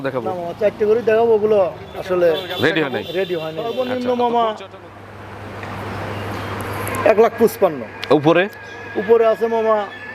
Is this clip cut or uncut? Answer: cut